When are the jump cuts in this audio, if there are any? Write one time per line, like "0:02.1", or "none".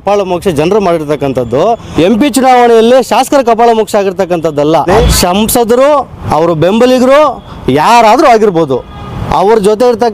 0:01.9
0:05.0
0:06.2